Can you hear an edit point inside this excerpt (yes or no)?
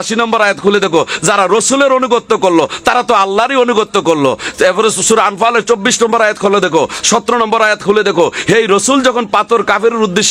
no